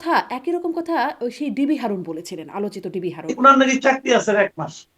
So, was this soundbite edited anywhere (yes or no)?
yes